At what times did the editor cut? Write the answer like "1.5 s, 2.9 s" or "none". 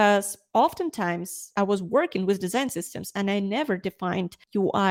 1.5 s